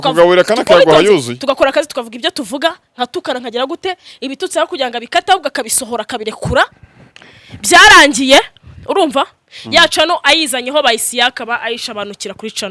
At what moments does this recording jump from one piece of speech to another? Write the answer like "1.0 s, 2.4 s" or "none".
6.8 s